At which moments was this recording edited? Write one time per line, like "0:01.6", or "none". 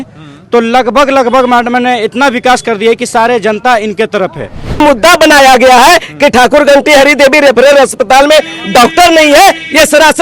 0:04.8